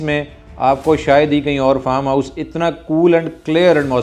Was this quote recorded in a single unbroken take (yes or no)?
yes